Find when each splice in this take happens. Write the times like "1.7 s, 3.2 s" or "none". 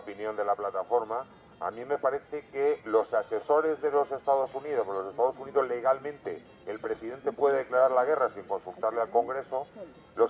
1.3 s